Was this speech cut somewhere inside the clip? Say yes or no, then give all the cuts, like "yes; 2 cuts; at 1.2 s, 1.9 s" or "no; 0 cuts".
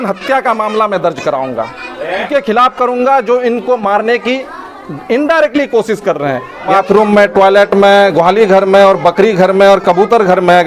yes; 2 cuts; at 2.3 s, 6.7 s